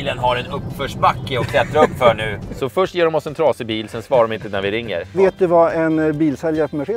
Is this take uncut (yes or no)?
no